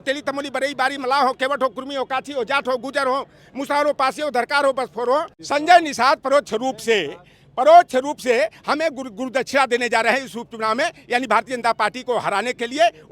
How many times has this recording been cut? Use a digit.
1